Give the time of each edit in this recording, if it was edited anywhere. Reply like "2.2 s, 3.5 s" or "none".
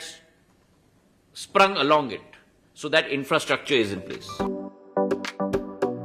4.2 s

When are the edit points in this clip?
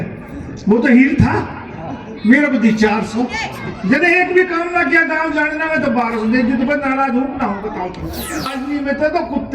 8.5 s

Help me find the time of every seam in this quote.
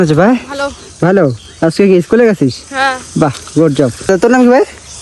4.1 s

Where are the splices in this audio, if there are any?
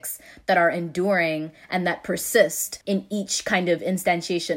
2.7 s

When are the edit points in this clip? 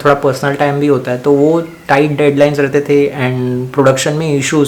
none

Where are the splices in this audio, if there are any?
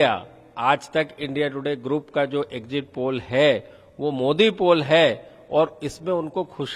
none

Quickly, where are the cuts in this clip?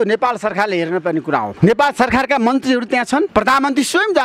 1.5 s, 3.3 s

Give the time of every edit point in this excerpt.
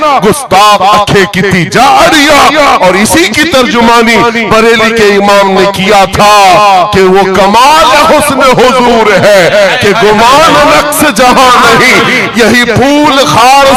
none

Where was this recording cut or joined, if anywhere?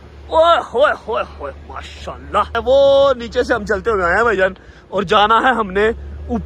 2.6 s

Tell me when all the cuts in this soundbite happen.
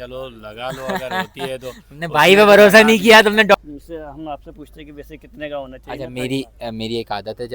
3.5 s

